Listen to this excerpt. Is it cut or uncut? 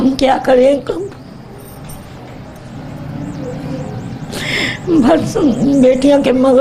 uncut